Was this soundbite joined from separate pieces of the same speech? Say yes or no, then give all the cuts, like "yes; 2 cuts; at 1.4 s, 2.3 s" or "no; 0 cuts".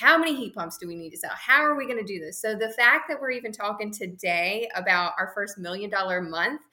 no; 0 cuts